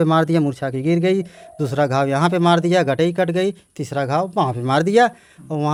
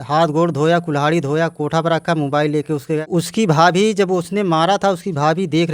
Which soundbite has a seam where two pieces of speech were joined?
second; 1 cut; at 3.1 s

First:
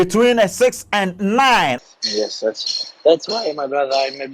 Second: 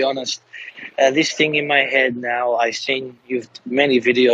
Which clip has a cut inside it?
first; 1 cut; at 1.8 s

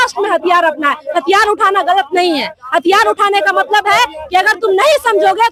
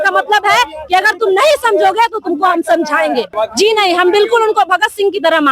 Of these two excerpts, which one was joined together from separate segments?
second; 1 cut; at 3.3 s

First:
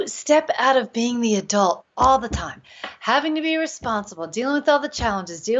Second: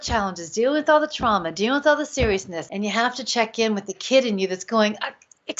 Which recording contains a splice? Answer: second; 1 cut; at 2.6 s

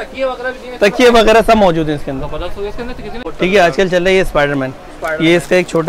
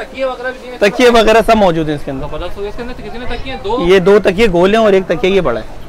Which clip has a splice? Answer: first; 1 cut; at 3.2 s

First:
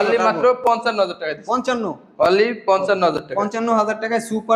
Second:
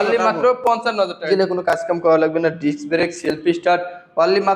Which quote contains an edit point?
second; 1 cut; at 1.2 s

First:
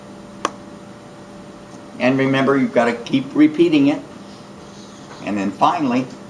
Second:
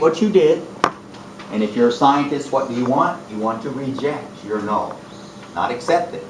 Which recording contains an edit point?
second; 1 cut; at 2.8 s

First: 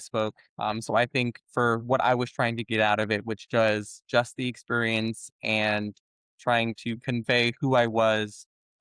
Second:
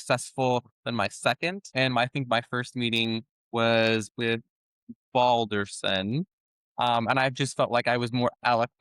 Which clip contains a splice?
second; 1 cut; at 1.6 s

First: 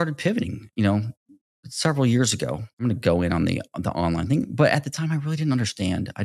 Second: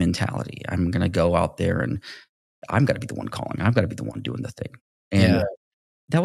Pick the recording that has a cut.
first; 1 cut; at 2.8 s

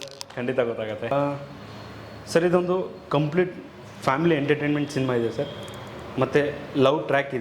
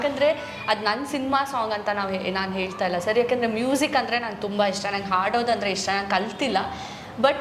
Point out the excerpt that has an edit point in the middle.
first; 1 cut; at 1.1 s

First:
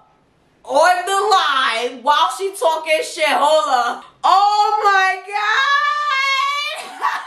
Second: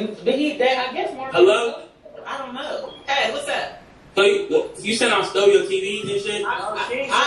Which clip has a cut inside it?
first; 1 cut; at 4.0 s

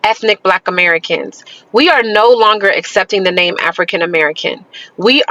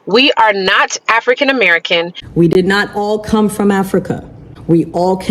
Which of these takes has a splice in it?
second; 1 cut; at 2.2 s

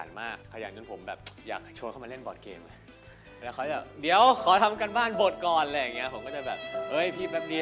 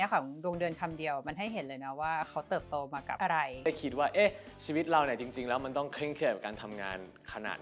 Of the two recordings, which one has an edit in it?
second; 1 cut; at 3.2 s

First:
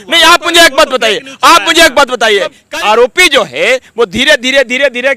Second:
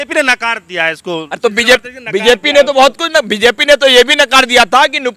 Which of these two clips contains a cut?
first; 1 cut; at 2.6 s

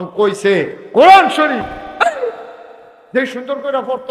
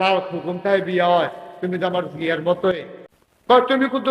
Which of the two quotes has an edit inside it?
second; 1 cut; at 2.7 s

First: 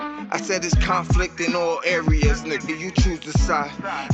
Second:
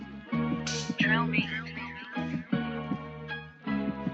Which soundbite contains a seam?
second; 1 cut; at 2.3 s

